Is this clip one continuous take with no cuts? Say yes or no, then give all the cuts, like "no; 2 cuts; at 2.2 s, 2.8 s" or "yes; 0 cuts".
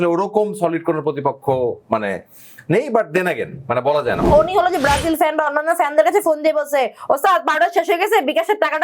no; 1 cut; at 4.2 s